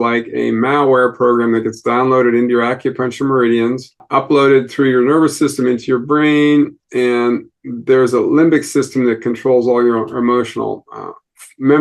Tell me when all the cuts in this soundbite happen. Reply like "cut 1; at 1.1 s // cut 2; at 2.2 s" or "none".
cut 1; at 4.0 s